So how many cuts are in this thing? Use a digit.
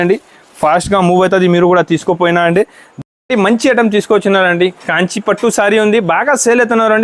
1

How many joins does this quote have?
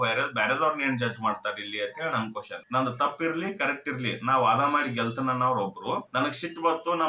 1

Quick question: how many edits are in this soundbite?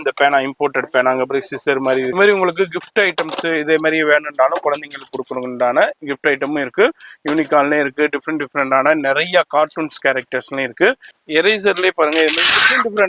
2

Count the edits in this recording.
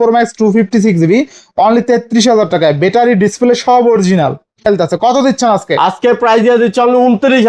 1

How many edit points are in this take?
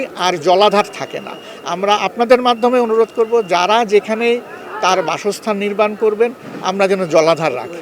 0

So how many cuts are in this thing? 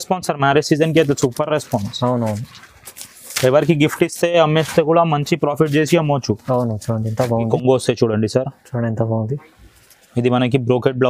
1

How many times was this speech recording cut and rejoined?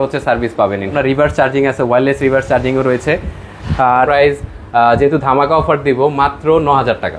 2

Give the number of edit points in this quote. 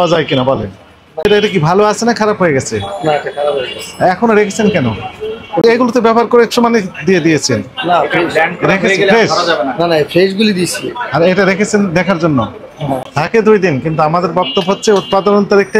3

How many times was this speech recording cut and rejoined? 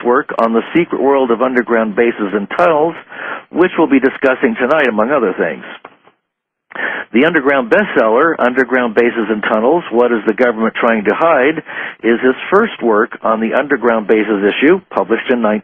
1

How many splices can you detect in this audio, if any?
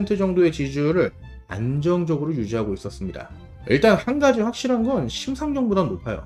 0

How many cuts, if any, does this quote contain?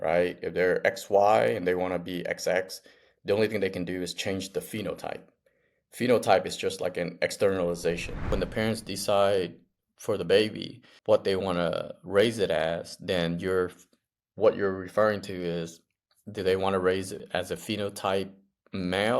3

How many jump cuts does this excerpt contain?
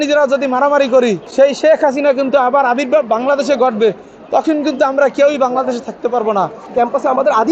2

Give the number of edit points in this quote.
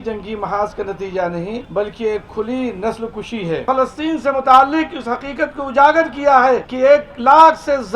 3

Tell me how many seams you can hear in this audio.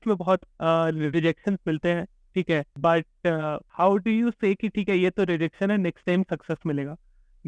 2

